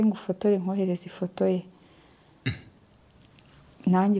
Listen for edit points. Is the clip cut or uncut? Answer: uncut